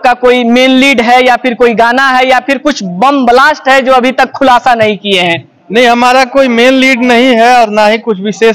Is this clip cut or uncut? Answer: uncut